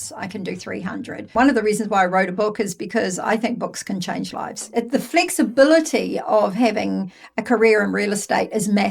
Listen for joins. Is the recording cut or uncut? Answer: cut